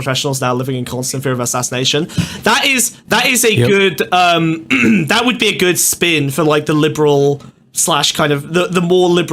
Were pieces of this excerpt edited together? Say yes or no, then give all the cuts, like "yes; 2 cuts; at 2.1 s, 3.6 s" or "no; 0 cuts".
no; 0 cuts